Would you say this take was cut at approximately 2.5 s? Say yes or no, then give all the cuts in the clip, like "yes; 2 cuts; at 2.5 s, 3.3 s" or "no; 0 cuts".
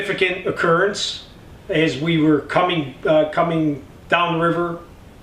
no; 1 cut; at 1.1 s